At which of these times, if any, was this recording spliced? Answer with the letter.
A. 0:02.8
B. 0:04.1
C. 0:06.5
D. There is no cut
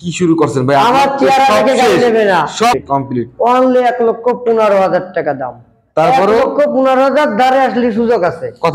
A